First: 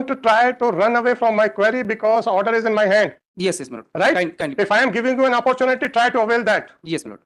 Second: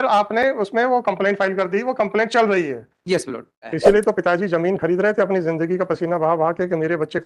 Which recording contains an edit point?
second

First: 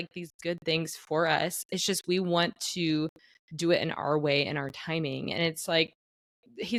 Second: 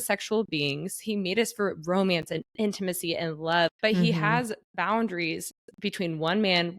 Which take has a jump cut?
second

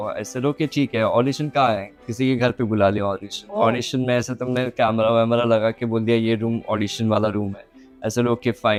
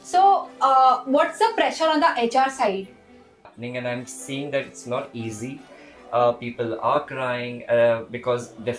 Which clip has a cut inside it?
second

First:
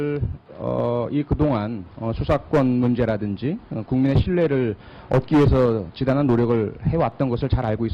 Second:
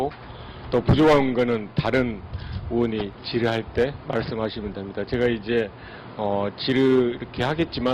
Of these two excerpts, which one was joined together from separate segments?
first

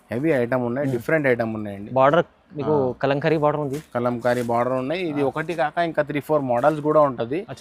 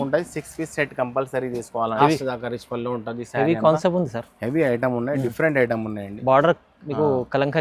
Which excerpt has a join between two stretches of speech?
second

